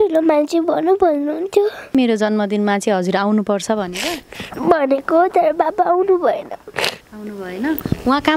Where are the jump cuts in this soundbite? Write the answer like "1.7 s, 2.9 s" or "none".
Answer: 1.9 s